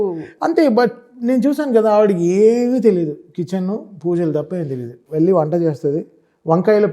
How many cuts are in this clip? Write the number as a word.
zero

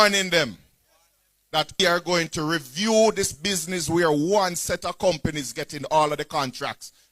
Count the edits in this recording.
one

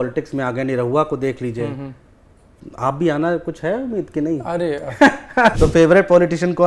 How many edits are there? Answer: one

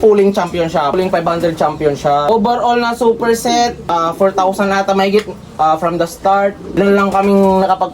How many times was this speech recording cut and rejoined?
four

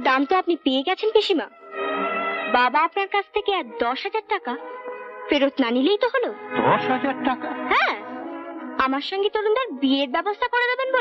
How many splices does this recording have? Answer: zero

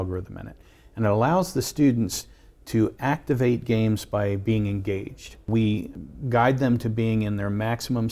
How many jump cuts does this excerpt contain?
two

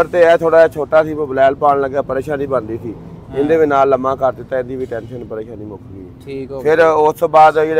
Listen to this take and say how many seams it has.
zero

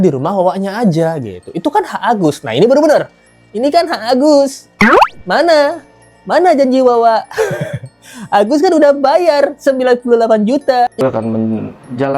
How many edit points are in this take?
one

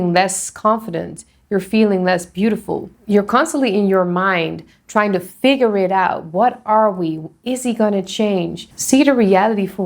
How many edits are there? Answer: one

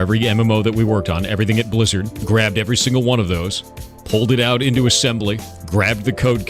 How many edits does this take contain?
one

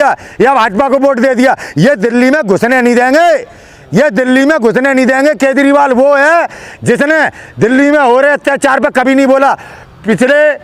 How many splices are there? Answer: zero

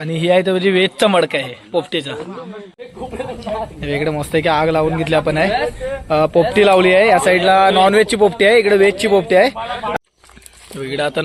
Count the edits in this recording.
two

